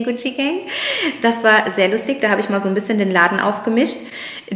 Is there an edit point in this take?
no; 0 cuts

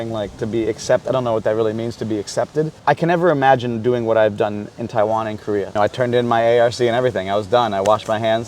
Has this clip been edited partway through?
yes; 2 cuts; at 2.7 s, 5.7 s

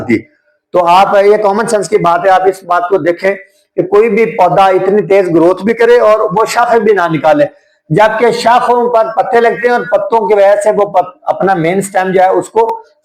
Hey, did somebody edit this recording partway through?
no; 0 cuts

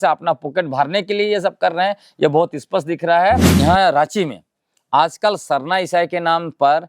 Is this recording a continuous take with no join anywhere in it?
no; 1 cut; at 3.5 s

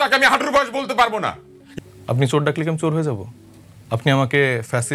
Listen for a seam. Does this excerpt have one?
yes; 1 cut; at 1.6 s

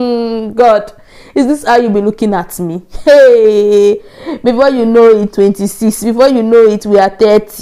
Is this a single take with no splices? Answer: yes; 0 cuts

